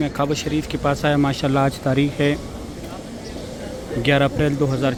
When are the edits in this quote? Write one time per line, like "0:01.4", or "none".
none